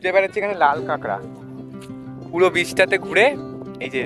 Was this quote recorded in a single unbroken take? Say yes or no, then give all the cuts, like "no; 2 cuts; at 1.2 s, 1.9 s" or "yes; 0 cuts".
yes; 0 cuts